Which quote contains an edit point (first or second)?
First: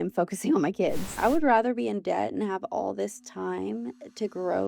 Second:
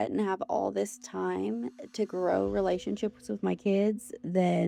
first